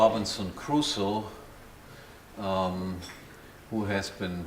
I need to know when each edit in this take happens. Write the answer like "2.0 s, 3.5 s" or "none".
none